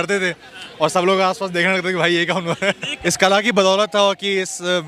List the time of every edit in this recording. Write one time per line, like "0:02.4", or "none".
0:02.9